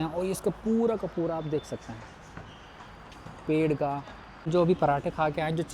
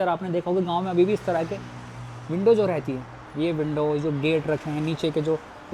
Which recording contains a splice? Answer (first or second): first